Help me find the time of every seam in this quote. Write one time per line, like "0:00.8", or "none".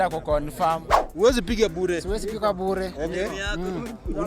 0:01.0